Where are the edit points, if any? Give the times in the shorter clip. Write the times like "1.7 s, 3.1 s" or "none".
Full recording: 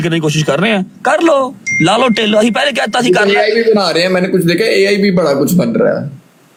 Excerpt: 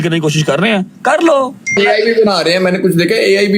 1.8 s